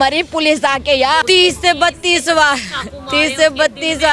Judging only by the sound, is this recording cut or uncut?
cut